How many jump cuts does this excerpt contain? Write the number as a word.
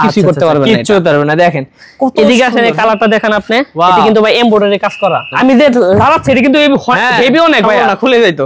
one